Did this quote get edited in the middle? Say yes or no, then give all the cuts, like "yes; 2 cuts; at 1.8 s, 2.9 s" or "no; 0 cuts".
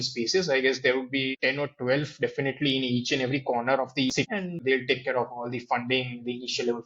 yes; 2 cuts; at 1.3 s, 4.6 s